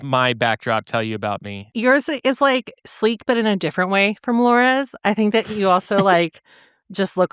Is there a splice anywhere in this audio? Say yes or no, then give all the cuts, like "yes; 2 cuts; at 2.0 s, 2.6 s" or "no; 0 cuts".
yes; 1 cut; at 1.7 s